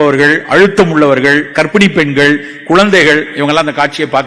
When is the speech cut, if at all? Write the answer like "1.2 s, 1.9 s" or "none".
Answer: none